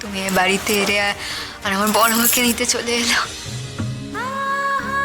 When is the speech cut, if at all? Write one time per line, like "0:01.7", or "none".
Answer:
none